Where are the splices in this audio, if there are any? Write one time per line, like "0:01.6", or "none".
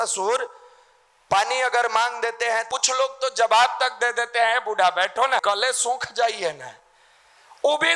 0:02.7
0:05.4